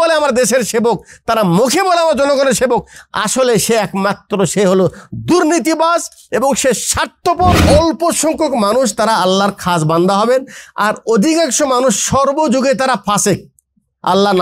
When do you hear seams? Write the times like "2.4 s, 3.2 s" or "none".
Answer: 7.6 s